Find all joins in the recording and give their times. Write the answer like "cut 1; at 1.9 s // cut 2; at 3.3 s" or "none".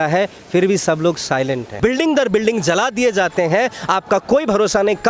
cut 1; at 1.7 s